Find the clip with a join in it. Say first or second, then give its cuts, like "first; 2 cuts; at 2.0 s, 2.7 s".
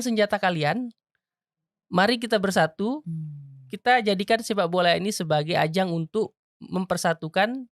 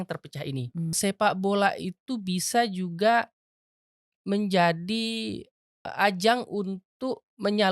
second; 2 cuts; at 0.9 s, 5.9 s